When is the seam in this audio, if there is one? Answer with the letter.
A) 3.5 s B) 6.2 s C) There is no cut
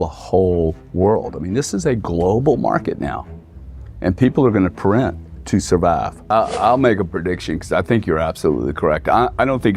B